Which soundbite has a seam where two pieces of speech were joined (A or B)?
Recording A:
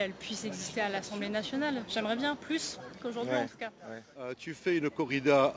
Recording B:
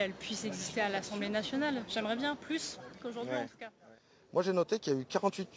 A